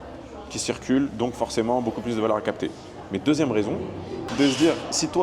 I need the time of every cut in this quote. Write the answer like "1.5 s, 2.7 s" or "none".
4.2 s